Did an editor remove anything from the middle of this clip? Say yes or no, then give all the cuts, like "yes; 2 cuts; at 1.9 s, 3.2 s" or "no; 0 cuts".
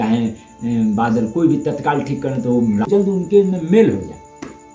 yes; 1 cut; at 2.9 s